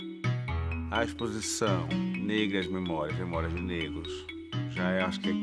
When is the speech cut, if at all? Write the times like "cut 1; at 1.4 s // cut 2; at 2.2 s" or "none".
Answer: cut 1; at 1.1 s